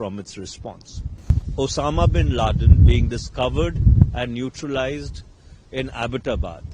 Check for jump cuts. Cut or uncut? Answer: cut